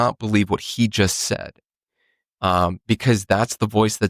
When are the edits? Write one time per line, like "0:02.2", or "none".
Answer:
none